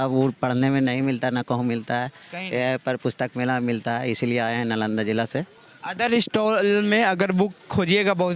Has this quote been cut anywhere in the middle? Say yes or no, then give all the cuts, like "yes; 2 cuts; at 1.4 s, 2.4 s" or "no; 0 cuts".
no; 0 cuts